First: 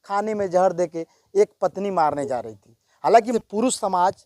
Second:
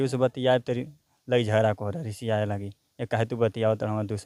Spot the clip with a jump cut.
first; 1 cut; at 3.3 s

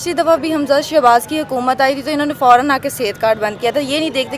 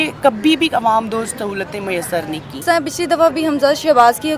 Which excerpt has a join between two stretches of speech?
second; 1 cut; at 2.0 s

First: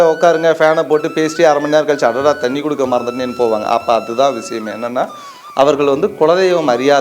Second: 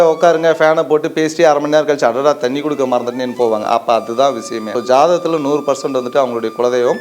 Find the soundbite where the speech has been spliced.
second; 1 cut; at 4.7 s

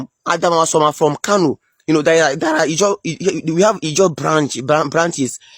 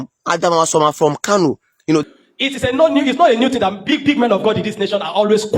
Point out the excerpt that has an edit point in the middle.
second; 1 cut; at 2.0 s

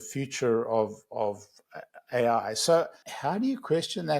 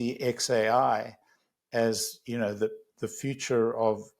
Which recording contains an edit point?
first; 1 cut; at 3.0 s

